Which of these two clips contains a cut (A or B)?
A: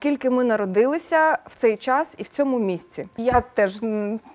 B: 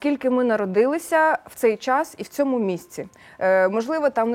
A